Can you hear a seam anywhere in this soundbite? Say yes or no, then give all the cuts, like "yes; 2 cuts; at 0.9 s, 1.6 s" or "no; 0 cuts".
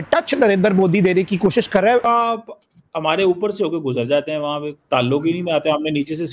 yes; 1 cut; at 2.0 s